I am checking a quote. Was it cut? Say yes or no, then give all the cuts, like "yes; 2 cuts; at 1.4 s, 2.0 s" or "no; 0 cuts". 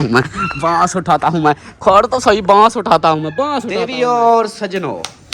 yes; 1 cut; at 3.9 s